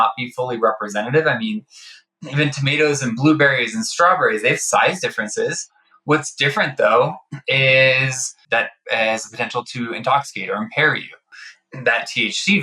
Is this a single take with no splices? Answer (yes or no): no